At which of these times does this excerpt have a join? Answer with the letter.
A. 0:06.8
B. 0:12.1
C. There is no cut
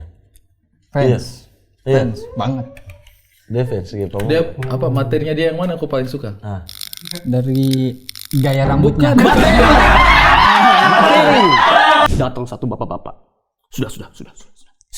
B